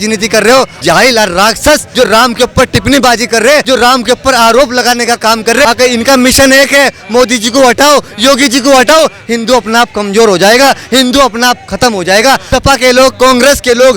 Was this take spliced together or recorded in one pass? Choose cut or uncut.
cut